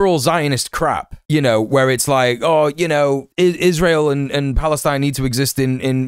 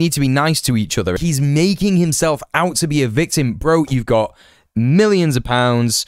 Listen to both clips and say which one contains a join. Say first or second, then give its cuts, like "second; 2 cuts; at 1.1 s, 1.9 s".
second; 1 cut; at 1.2 s